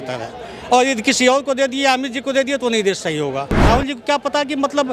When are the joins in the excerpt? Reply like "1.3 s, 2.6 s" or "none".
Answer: 3.6 s